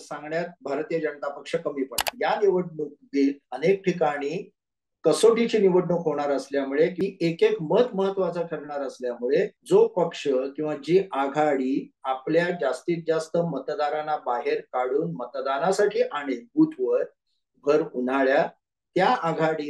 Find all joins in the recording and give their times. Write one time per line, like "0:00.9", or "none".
0:02.1
0:06.9
0:09.6